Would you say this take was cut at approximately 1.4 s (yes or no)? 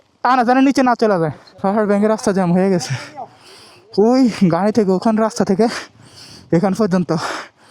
yes